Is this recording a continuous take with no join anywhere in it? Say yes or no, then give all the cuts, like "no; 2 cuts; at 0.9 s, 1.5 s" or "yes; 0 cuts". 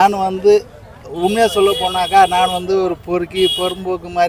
yes; 0 cuts